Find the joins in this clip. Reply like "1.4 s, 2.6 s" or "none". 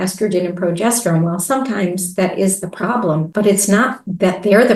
none